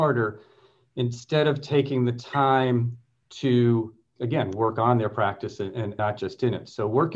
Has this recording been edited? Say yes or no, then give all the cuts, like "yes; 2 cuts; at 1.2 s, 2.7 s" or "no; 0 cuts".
yes; 1 cut; at 5.9 s